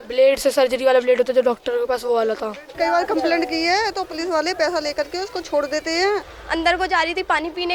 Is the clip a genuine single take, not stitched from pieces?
no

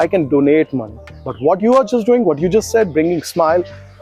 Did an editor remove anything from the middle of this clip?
no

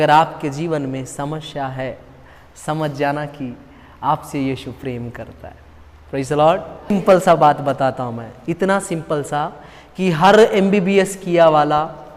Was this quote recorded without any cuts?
no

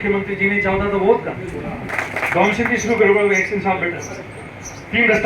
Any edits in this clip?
yes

